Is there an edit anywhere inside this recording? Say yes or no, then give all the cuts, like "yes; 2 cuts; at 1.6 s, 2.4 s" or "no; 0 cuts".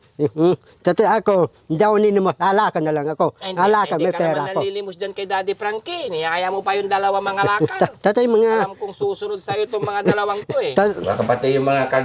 yes; 1 cut; at 11.0 s